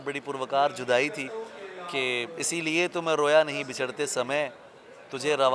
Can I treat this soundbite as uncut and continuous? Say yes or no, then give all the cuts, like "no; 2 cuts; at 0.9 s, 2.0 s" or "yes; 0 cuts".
yes; 0 cuts